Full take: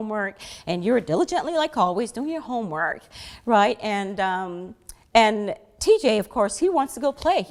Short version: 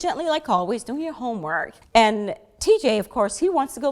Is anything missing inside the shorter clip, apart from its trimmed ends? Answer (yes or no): yes